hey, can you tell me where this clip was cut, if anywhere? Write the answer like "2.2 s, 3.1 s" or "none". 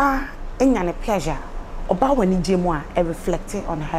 none